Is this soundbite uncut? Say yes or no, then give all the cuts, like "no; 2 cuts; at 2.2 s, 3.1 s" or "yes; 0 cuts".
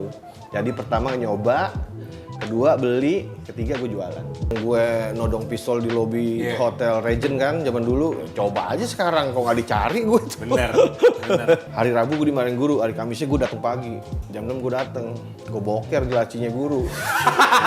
no; 2 cuts; at 4.5 s, 11.7 s